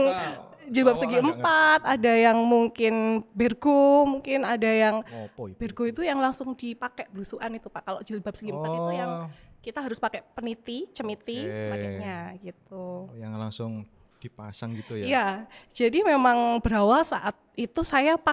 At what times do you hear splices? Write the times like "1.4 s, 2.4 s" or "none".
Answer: none